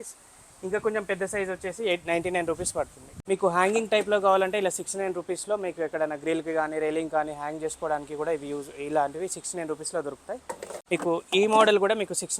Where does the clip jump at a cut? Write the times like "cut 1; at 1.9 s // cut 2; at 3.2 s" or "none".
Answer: cut 1; at 3.2 s // cut 2; at 10.7 s